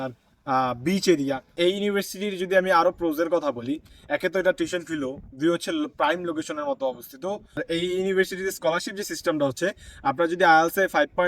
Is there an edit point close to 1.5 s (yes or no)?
yes